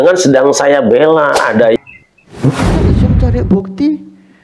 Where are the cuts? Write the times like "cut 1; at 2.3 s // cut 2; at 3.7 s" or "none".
cut 1; at 1.8 s